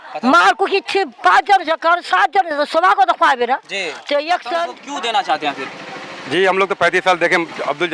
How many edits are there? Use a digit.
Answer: 1